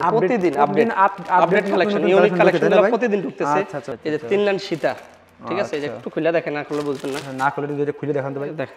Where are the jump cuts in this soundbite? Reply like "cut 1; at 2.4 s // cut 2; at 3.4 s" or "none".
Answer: cut 1; at 3.8 s